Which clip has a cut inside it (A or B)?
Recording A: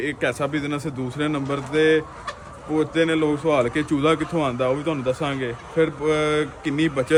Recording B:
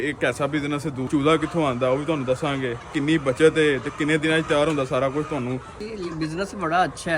B